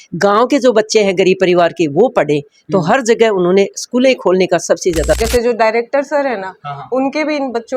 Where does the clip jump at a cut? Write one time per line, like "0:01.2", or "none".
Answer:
0:05.2